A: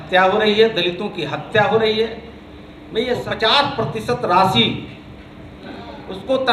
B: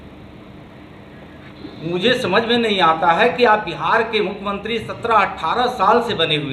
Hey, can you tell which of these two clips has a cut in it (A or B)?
A